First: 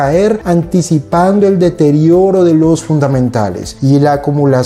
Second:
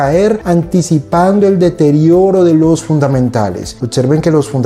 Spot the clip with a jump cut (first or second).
second